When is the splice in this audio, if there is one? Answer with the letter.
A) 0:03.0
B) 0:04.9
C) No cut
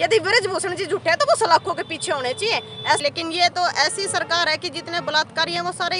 A